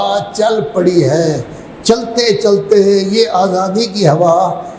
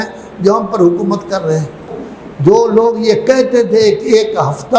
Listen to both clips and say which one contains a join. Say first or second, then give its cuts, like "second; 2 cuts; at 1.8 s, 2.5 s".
second; 1 cut; at 1.9 s